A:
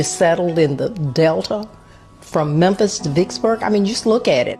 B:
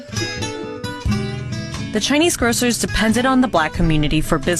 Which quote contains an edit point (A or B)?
B